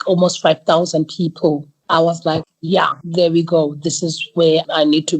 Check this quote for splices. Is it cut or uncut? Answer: cut